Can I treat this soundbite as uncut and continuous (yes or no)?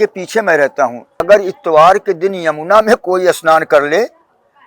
no